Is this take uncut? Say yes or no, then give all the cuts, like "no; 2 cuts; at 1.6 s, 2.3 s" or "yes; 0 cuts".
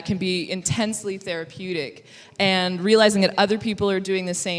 yes; 0 cuts